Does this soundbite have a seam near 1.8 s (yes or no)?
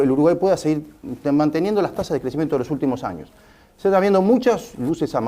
no